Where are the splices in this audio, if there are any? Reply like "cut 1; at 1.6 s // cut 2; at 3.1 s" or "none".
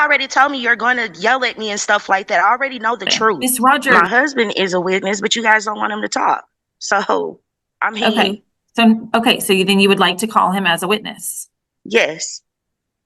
cut 1; at 3.9 s // cut 2; at 9.0 s